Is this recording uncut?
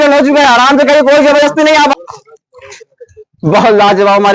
no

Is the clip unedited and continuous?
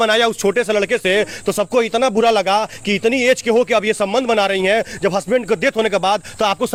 yes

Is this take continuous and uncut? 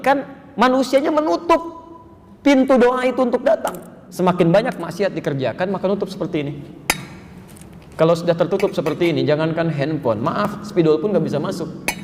no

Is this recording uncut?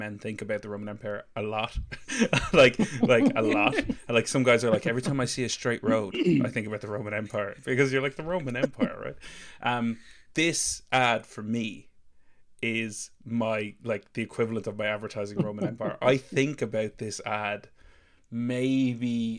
yes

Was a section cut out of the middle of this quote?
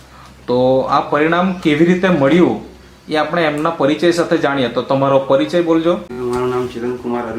yes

